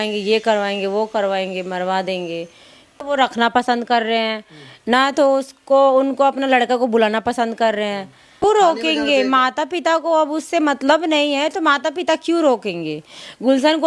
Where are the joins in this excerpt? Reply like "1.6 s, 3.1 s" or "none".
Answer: 2.9 s, 8.4 s

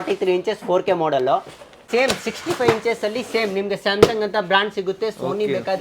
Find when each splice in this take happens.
1.8 s

